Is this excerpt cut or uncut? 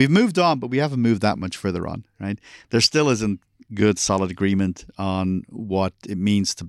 uncut